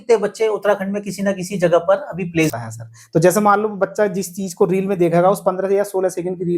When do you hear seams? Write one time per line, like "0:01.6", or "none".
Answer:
0:02.6